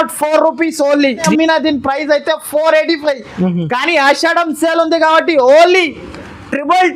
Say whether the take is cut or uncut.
cut